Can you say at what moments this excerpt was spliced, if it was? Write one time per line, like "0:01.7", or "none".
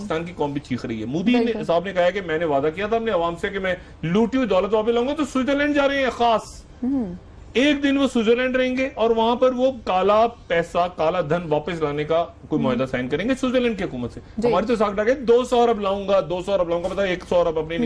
0:11.6